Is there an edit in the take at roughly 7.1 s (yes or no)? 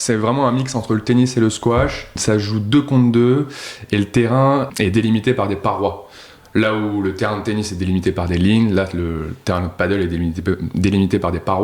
no